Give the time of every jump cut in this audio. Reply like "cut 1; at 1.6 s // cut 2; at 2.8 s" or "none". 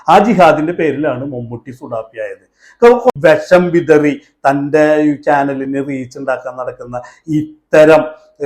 cut 1; at 3.1 s